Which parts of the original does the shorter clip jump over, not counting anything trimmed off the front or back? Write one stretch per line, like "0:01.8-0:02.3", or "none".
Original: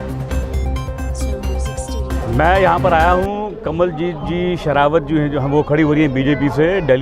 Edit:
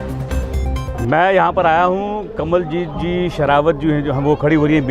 0:01.0-0:02.3

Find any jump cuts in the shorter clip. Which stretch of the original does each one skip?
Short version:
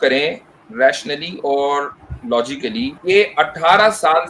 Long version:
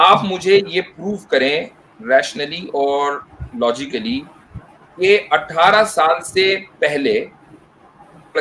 0:04.3-0:04.9

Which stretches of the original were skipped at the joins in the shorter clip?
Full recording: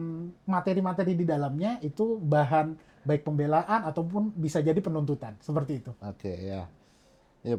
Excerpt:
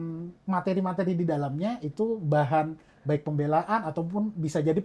none

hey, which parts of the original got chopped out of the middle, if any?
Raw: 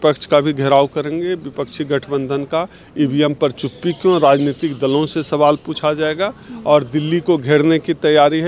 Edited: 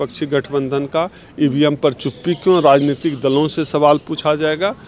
none

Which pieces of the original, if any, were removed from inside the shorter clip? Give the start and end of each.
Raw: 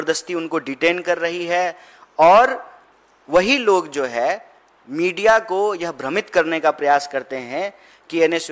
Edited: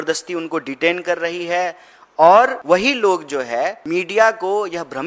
0:02.6-0:03.2
0:04.4-0:04.9

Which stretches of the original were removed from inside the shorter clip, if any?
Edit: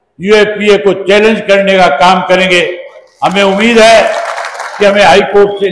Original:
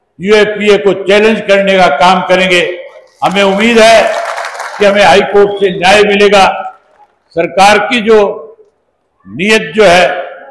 none

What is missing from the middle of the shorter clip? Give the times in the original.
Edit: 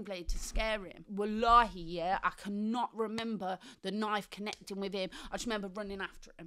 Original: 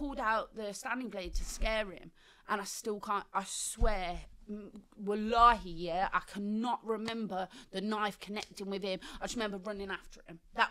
0:02.0-0:04.9

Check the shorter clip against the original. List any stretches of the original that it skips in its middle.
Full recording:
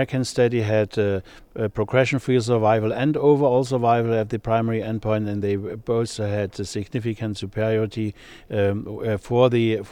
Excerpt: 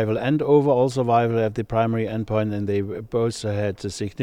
none

